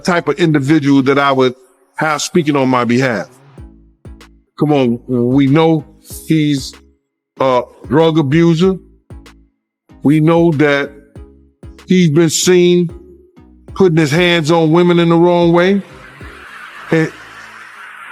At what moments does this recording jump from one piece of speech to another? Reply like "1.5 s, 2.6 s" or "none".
none

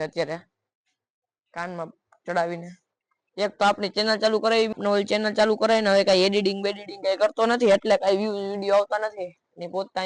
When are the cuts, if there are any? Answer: none

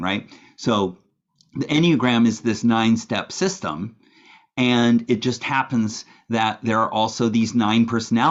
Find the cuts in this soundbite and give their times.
none

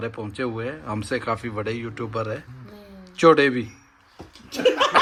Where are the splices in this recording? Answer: none

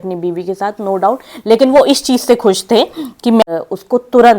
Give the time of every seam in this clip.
3.4 s

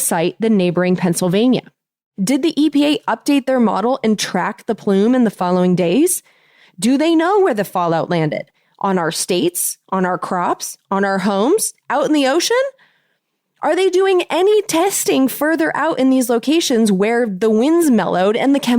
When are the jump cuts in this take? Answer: 2.1 s

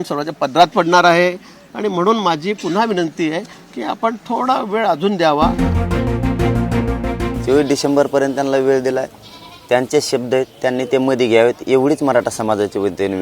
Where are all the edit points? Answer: 5.8 s, 7.3 s

